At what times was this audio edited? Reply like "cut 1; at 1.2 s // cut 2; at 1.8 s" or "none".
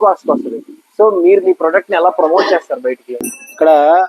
cut 1; at 3.1 s